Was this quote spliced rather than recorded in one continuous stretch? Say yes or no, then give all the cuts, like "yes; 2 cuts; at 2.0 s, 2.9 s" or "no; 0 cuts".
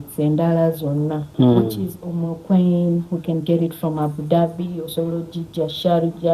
yes; 1 cut; at 1.2 s